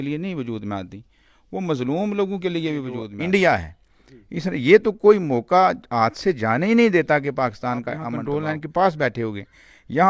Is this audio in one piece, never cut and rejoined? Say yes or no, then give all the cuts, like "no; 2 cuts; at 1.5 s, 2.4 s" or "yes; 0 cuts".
no; 2 cuts; at 3.1 s, 8.1 s